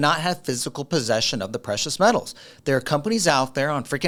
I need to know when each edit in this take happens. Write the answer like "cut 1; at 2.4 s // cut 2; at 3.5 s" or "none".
none